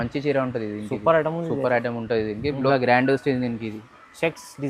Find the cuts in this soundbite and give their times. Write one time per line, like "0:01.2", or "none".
0:02.7